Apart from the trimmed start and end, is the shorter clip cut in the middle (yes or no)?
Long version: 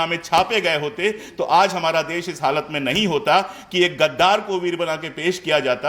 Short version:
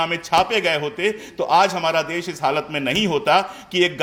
no